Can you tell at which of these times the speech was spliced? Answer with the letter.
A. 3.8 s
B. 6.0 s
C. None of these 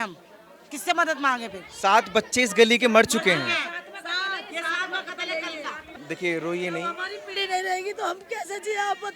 B